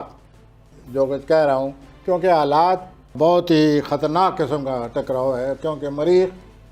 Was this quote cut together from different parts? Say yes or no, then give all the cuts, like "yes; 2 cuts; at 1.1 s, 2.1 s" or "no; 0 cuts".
yes; 1 cut; at 3.1 s